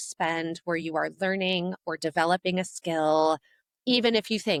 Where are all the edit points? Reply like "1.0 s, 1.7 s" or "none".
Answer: none